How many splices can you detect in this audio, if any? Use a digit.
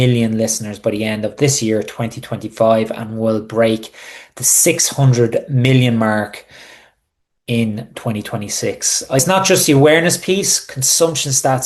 1